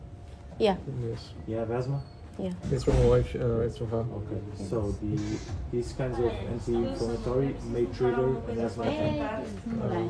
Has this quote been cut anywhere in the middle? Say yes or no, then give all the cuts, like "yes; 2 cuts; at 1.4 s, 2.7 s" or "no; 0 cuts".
no; 0 cuts